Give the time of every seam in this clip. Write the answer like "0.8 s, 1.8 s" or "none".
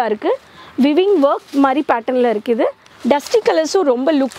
2.9 s